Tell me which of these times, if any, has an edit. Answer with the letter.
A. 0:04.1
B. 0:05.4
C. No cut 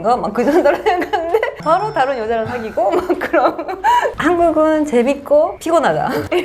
A